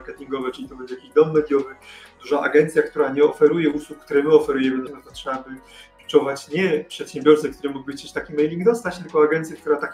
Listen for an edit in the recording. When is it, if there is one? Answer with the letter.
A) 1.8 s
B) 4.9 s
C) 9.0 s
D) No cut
B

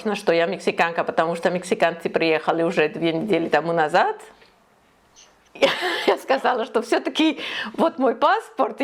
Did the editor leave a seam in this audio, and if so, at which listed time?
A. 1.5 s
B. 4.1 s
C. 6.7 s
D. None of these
D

